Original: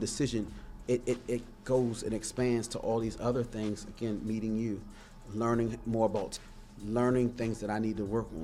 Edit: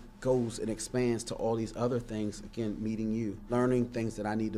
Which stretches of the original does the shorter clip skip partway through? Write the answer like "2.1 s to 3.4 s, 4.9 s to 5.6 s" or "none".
4.9 s to 6.9 s